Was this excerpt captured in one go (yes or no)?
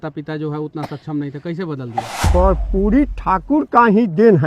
no